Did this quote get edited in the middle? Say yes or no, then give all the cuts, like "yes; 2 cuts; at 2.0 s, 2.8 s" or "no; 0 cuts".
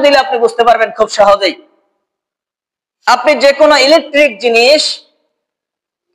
no; 0 cuts